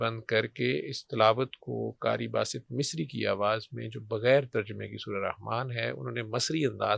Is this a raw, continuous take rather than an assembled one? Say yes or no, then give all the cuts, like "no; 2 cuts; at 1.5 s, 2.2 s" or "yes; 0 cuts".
yes; 0 cuts